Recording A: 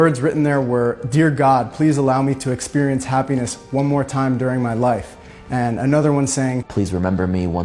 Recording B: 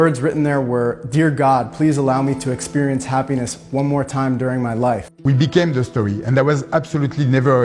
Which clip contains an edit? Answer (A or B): B